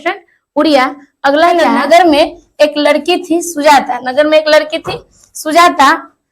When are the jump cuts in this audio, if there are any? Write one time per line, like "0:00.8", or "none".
0:01.7